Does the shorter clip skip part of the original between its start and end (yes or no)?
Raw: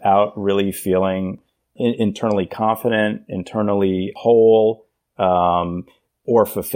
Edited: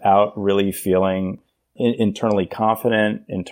no